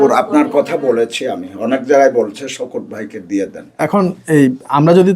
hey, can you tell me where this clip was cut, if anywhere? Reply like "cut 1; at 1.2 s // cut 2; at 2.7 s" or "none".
cut 1; at 3.6 s

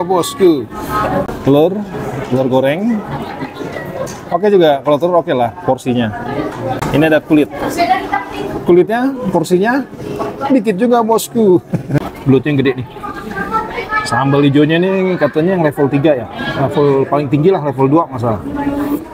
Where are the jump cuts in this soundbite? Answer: cut 1; at 1.2 s // cut 2; at 12.0 s

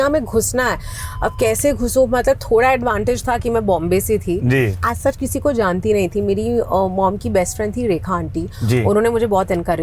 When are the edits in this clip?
cut 1; at 4.8 s

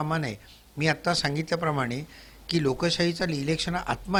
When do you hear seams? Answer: none

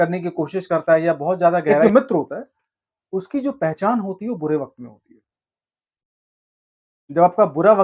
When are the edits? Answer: cut 1; at 1.8 s

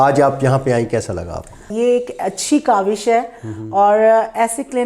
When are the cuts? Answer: cut 1; at 1.7 s

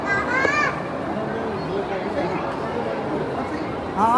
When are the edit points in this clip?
none

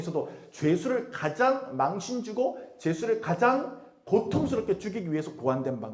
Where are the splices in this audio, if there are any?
none

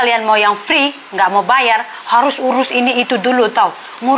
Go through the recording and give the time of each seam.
none

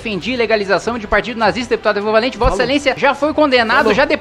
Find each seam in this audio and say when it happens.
cut 1; at 3.0 s

